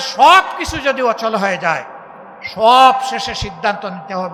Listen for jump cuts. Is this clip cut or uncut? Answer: uncut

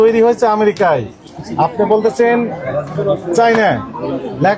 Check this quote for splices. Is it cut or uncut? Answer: uncut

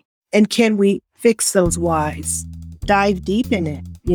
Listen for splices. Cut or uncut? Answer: cut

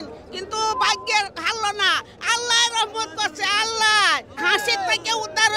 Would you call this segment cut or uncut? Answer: cut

